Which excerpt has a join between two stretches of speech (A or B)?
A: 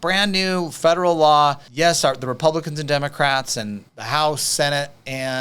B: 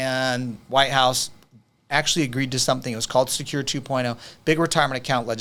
A